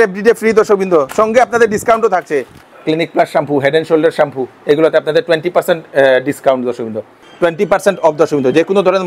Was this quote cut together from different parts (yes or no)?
yes